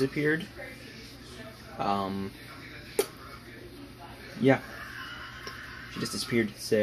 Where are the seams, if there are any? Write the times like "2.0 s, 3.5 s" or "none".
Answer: none